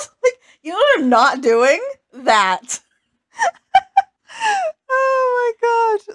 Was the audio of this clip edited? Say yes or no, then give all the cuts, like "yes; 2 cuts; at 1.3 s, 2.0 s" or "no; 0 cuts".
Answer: yes; 1 cut; at 4.2 s